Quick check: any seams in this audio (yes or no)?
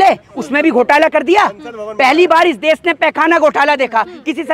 no